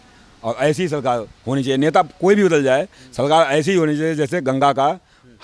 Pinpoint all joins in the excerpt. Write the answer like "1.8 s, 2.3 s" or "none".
none